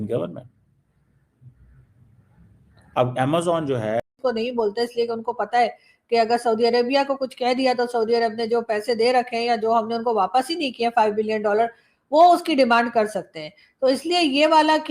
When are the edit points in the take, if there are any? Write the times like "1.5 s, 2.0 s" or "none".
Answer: 4.1 s